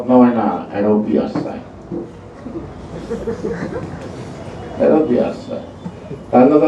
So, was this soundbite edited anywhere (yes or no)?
no